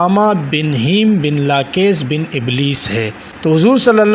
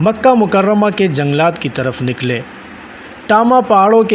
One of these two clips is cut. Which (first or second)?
first